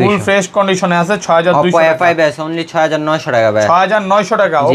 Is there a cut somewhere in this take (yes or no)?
no